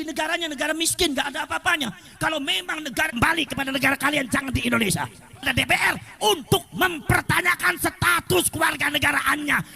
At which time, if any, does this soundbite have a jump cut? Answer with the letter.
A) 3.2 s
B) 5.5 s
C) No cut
B